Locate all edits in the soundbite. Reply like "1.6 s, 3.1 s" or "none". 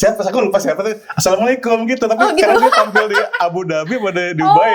none